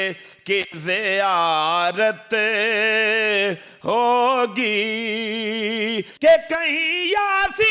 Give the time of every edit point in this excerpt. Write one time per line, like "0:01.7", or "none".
none